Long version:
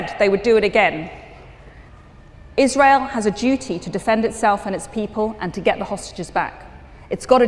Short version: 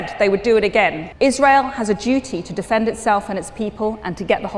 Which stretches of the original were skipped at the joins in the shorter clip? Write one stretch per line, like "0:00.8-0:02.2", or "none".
0:01.0-0:02.4